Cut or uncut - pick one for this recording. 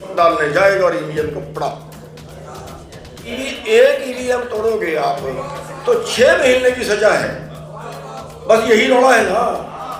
cut